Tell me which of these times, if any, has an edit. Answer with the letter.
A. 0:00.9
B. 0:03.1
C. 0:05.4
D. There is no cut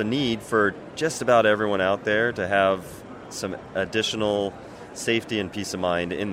D